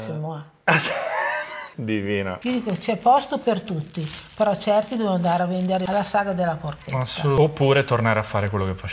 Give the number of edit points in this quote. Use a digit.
3